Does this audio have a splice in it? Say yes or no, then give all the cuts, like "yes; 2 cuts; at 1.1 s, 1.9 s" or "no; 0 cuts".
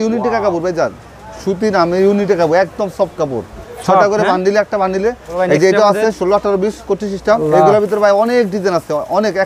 yes; 2 cuts; at 5.3 s, 7.4 s